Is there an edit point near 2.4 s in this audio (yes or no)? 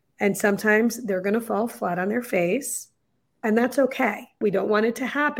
no